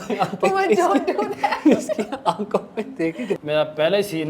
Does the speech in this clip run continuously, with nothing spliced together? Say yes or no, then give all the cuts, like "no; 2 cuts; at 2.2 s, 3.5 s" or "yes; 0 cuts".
no; 1 cut; at 3.4 s